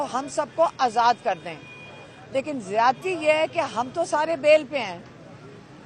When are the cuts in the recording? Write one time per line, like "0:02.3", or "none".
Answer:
none